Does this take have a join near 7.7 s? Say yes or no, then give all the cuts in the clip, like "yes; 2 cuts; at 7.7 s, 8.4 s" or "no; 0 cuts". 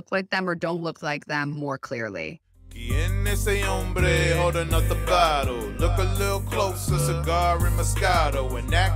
no; 1 cut; at 2.7 s